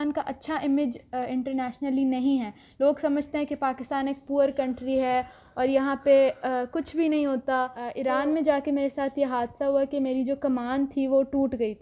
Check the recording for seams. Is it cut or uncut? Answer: cut